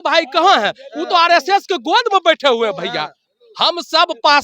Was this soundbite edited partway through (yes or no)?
no